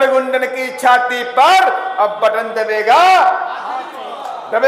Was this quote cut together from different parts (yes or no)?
no